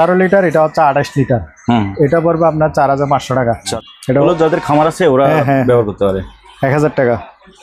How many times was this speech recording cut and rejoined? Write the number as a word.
one